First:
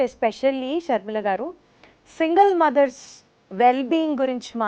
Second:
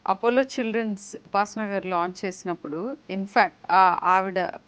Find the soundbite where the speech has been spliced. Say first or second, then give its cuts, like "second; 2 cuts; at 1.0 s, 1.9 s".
second; 2 cuts; at 1.2 s, 3.6 s